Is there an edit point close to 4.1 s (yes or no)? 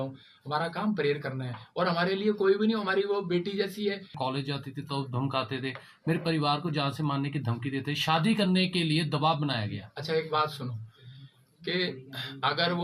yes